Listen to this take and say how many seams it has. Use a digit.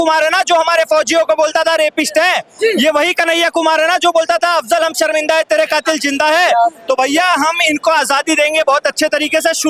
0